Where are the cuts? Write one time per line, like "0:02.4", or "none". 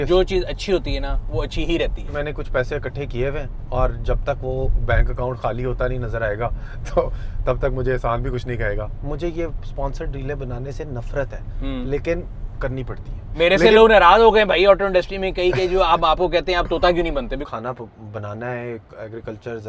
0:02.1
0:08.9
0:17.4